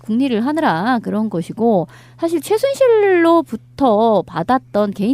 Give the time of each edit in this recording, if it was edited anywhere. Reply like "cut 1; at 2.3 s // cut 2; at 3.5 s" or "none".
cut 1; at 4.0 s